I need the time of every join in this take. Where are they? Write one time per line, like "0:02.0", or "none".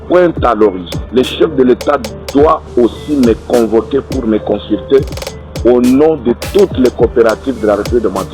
none